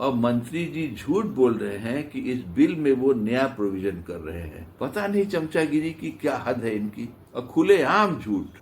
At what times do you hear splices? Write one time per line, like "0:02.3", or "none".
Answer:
0:04.6
0:07.3